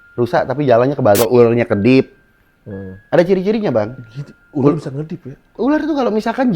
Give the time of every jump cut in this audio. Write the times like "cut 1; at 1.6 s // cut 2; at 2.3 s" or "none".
cut 1; at 1.2 s